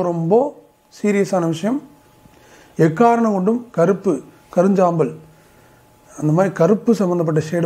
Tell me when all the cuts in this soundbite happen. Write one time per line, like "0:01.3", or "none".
none